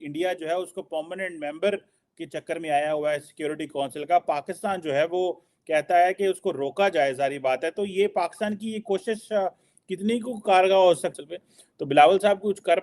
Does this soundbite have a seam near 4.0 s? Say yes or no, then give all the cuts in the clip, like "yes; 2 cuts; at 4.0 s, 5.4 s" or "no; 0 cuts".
no; 1 cut; at 11.2 s